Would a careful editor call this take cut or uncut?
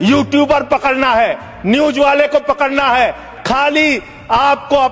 cut